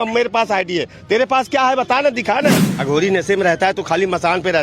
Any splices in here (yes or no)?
yes